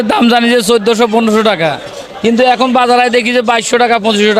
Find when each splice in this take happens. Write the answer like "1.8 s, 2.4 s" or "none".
none